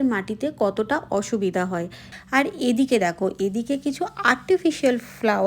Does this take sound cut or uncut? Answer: cut